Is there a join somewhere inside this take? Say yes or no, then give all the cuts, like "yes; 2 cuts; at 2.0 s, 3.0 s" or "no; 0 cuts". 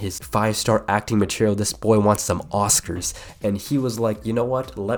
no; 0 cuts